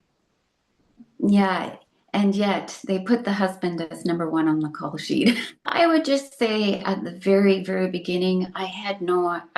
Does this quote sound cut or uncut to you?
cut